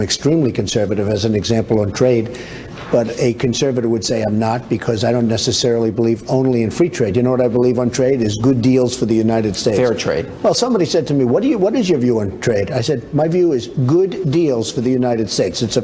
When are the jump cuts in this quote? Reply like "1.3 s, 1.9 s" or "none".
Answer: 12.1 s